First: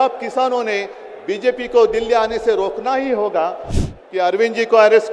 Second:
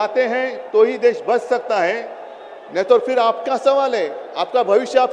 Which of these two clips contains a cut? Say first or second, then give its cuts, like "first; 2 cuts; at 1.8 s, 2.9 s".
first; 1 cut; at 3.7 s